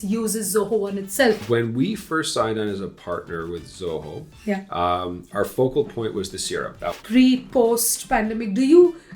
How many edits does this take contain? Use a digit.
2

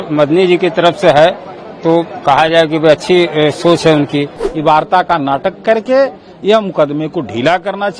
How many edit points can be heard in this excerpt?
1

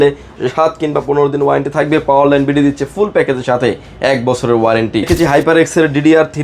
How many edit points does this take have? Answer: 1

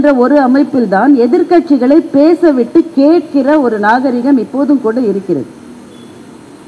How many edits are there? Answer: 0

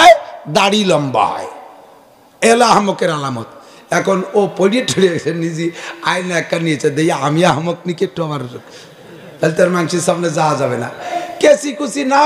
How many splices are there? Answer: 1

